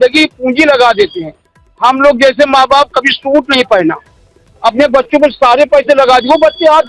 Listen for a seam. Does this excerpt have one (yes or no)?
no